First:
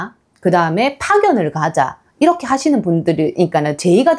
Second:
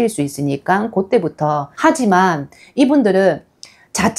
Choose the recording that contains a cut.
second; 1 cut; at 1.7 s

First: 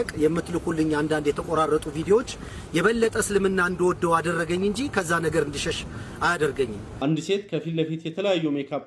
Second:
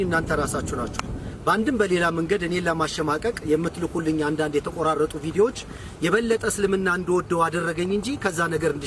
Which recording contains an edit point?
first; 1 cut; at 6.8 s

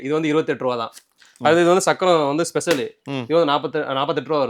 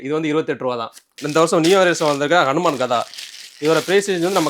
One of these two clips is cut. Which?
second; 1 cut; at 1.2 s

